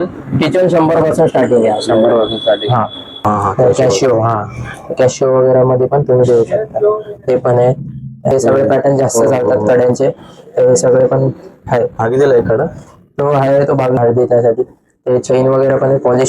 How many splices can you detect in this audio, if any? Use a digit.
3